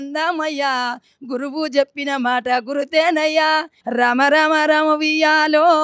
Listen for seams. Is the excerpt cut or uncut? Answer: cut